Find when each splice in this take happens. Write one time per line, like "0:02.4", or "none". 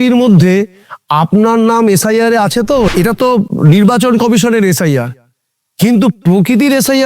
0:03.2